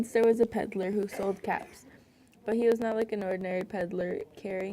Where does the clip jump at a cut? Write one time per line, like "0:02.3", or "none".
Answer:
0:03.4